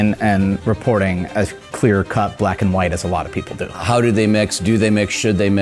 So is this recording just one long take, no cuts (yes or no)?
no